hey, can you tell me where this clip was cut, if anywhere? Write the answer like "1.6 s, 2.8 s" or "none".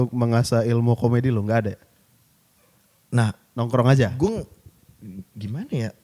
none